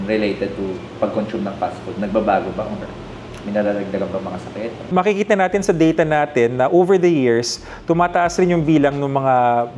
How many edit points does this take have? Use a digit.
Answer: 1